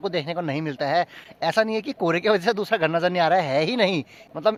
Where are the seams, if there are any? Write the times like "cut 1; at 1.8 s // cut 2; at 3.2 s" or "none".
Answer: none